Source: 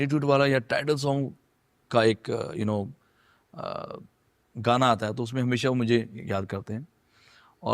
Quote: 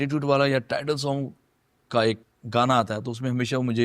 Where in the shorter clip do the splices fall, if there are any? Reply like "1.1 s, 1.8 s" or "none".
2.2 s